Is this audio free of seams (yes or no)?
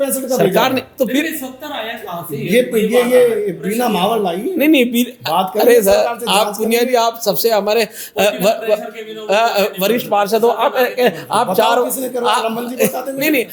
yes